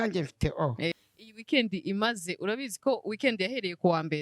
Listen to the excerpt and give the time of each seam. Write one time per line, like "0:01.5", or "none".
0:01.0